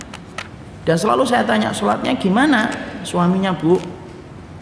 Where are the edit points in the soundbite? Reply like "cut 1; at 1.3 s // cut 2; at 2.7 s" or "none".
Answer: none